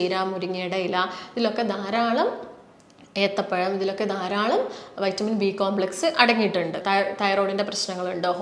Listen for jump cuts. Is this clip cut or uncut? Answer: cut